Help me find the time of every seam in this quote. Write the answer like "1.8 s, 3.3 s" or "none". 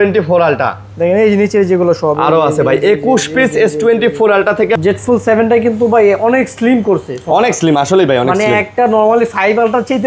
4.8 s